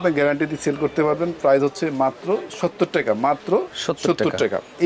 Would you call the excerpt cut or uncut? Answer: uncut